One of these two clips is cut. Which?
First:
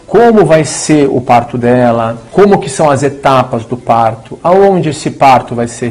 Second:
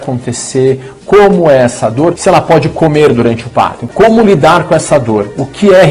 second; 2 cuts; at 2.2 s, 3.9 s

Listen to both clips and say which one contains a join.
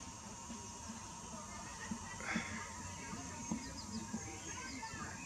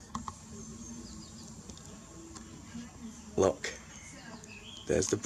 first; 1 cut; at 3.5 s

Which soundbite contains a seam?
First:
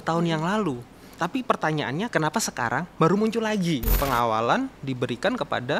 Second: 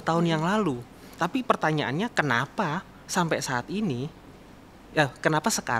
first; 2 cuts; at 2.1 s, 3.9 s

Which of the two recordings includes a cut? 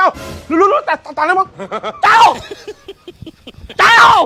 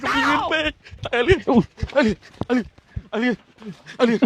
second; 1 cut; at 1.1 s

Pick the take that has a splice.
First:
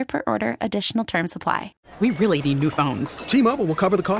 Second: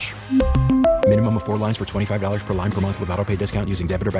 first; 1 cut; at 1.8 s

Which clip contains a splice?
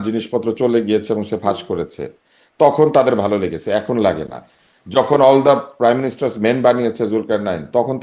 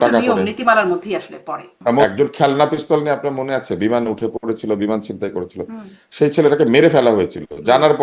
second; 1 cut; at 2.1 s

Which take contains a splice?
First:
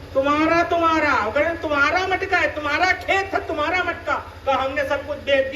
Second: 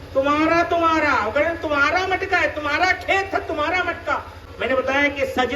second; 1 cut; at 4.3 s

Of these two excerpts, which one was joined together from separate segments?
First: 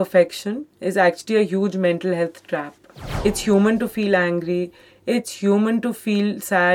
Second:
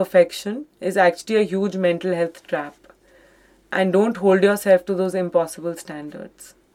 first; 1 cut; at 3.1 s

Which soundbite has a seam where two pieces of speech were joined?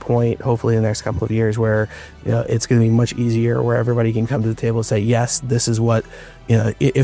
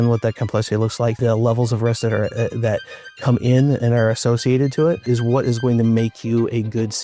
second; 2 cuts; at 1.2 s, 5.0 s

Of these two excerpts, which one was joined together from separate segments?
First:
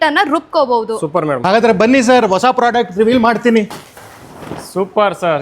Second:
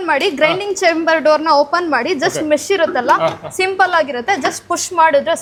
first; 2 cuts; at 1.4 s, 3.8 s

